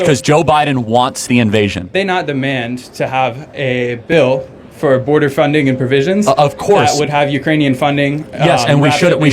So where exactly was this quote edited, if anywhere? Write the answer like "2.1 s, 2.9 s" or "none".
1.9 s